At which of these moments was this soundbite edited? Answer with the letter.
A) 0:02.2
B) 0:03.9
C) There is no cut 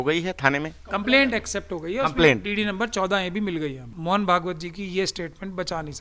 B